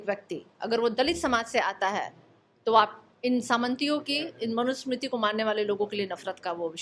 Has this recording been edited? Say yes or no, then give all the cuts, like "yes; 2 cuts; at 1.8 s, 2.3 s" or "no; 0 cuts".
no; 0 cuts